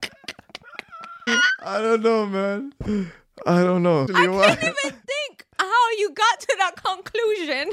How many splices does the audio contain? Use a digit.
2